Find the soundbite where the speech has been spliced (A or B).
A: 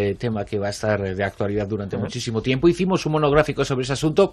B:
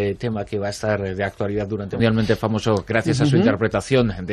A